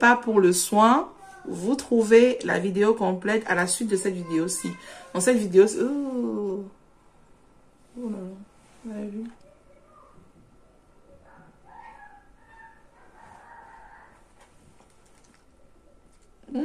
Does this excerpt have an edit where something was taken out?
no; 0 cuts

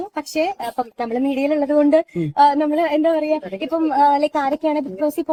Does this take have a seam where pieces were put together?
no; 0 cuts

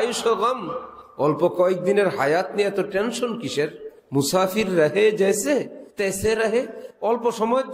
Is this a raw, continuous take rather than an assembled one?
no; 2 cuts; at 5.8 s, 6.8 s

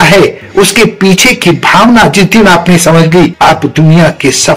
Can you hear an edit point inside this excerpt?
yes; 1 cut; at 3.3 s

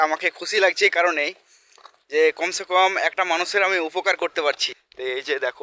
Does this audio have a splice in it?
yes; 1 cut; at 4.7 s

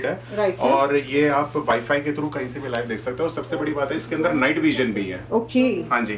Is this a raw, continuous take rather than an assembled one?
yes; 0 cuts

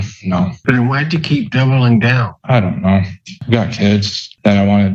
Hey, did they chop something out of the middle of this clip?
yes; 2 cuts; at 2.3 s, 3.4 s

